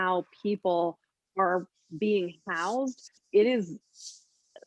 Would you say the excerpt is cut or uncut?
cut